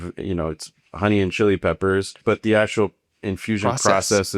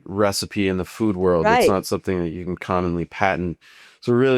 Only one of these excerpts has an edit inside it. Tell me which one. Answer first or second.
first